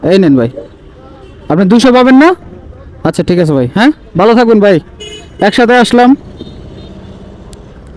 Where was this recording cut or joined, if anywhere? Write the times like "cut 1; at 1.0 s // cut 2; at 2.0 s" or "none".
none